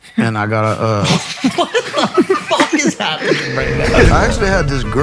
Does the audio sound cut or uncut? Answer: cut